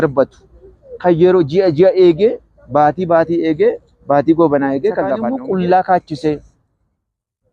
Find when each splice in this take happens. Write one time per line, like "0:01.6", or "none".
0:05.3